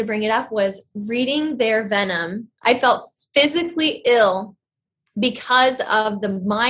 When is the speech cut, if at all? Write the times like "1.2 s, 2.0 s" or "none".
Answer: 2.5 s